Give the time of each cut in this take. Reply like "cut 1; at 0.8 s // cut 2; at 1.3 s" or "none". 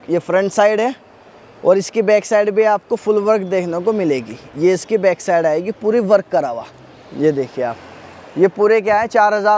none